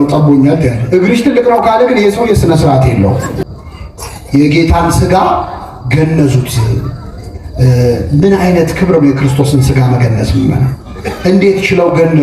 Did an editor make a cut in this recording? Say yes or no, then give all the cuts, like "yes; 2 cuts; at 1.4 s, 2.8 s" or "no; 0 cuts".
yes; 1 cut; at 3.4 s